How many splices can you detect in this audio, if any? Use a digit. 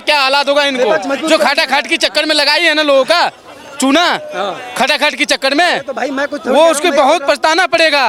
0